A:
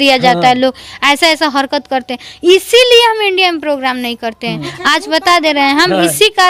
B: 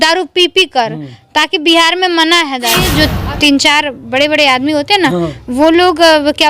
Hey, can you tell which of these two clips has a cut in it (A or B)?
B